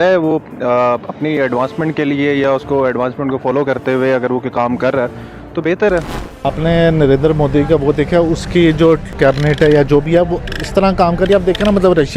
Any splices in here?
yes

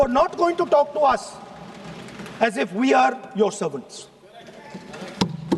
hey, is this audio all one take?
yes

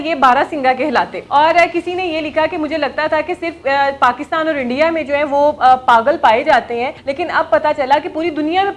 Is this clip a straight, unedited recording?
no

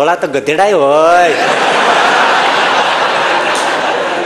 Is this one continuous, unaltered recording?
yes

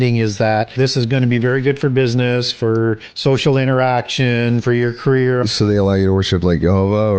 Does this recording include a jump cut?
yes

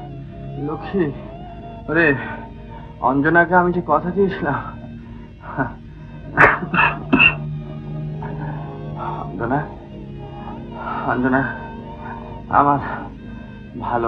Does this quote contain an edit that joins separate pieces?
no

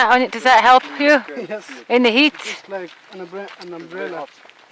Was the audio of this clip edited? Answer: no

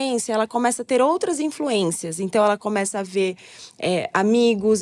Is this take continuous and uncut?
yes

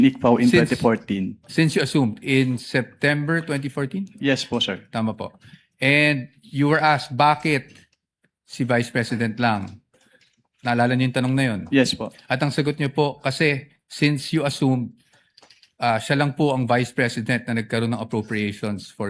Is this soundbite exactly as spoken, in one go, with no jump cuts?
yes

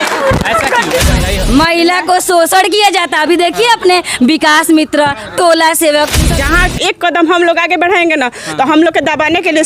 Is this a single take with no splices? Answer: no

